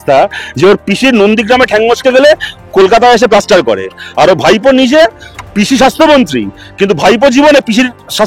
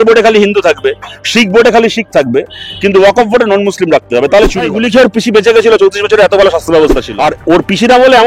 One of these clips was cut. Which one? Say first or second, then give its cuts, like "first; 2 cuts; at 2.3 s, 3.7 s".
second; 2 cuts; at 4.7 s, 7.1 s